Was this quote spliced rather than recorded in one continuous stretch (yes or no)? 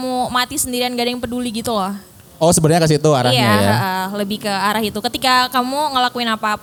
no